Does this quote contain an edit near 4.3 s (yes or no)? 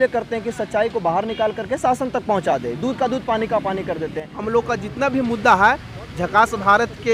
yes